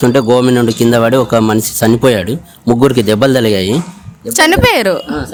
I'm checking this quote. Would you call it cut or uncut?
uncut